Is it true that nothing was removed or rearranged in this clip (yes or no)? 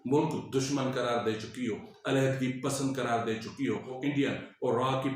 no